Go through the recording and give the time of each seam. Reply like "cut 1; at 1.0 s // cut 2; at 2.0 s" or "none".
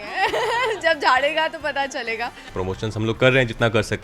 cut 1; at 2.4 s

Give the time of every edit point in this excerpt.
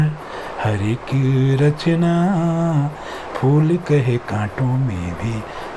none

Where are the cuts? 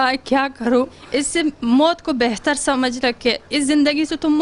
cut 1; at 1.0 s

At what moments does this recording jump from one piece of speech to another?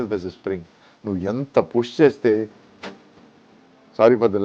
none

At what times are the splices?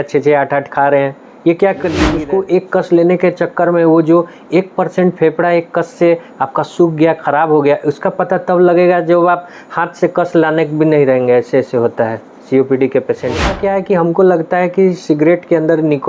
cut 1; at 2.1 s // cut 2; at 13.5 s

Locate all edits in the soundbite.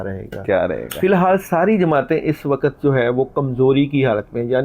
cut 1; at 0.9 s

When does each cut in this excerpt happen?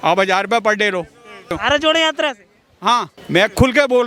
cut 1; at 1.6 s // cut 2; at 3.2 s

